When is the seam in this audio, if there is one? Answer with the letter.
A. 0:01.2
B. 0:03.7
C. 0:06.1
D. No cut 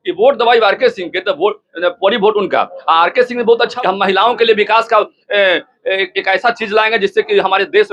B